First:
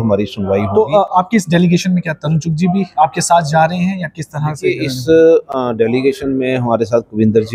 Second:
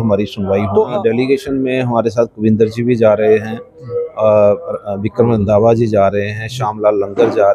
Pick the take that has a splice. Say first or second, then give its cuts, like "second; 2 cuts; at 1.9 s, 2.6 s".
second; 1 cut; at 0.9 s